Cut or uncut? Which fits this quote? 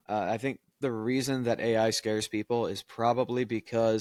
uncut